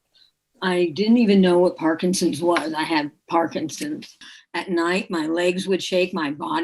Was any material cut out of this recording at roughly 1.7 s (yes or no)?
no